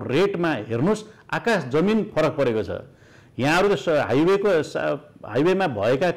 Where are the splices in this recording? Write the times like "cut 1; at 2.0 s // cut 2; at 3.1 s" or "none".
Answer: none